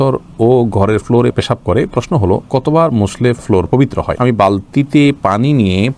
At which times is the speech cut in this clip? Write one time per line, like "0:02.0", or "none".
none